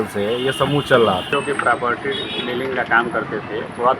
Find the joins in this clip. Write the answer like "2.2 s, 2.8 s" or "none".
1.3 s